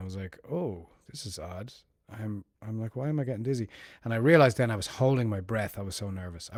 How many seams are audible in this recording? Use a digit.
0